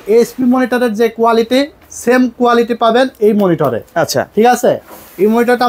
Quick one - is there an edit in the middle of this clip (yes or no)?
no